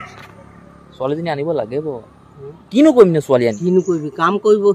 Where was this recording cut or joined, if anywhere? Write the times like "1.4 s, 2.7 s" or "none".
3.6 s